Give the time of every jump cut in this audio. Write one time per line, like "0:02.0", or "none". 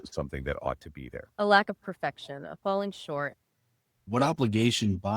0:03.9